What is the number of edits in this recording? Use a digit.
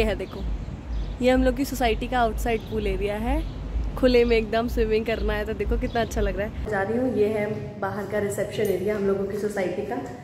1